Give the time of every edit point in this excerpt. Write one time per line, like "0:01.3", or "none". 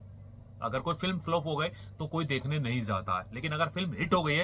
none